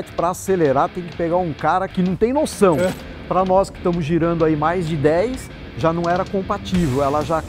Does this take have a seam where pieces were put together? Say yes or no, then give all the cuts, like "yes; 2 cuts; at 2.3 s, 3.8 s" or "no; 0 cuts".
yes; 2 cuts; at 1.9 s, 2.9 s